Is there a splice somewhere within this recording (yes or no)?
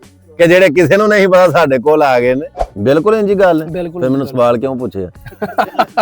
yes